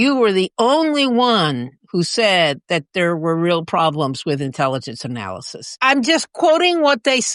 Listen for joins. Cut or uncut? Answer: uncut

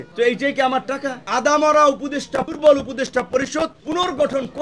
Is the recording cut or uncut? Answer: cut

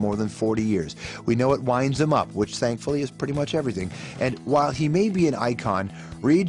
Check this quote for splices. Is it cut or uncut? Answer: uncut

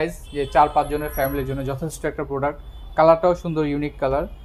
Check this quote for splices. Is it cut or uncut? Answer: uncut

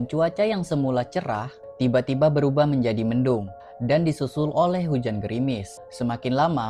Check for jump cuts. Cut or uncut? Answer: uncut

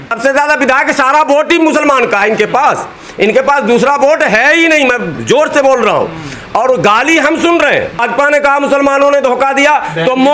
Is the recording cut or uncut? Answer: cut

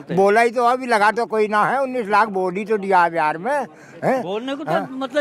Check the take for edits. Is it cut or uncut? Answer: uncut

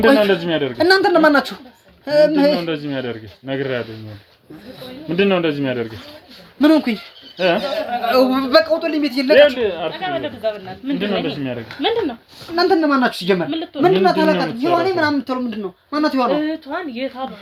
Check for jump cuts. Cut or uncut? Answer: uncut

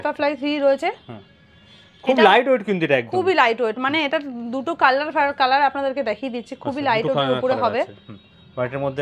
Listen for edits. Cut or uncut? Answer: uncut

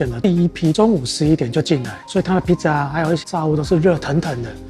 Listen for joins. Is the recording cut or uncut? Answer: cut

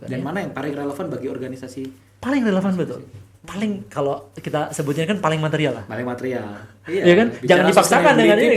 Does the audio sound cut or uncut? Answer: uncut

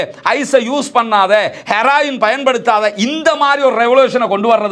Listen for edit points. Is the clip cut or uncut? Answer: uncut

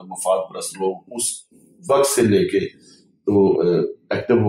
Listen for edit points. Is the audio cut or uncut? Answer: uncut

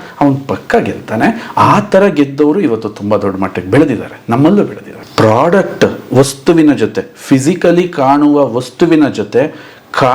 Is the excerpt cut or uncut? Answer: cut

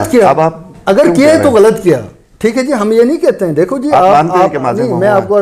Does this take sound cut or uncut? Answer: uncut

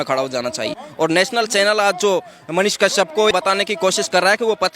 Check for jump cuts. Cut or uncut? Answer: cut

